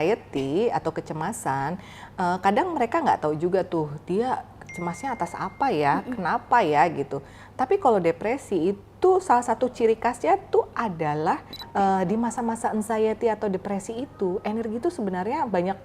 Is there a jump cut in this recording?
yes; 1 cut; at 11.6 s

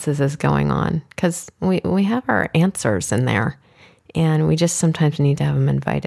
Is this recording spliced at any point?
no; 0 cuts

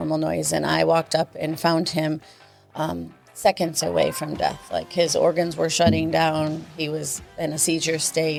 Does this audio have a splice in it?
no; 0 cuts

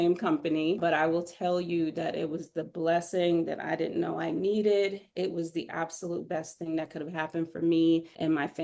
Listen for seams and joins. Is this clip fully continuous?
yes; 0 cuts

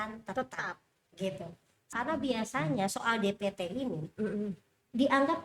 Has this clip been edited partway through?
yes; 1 cut; at 1.9 s

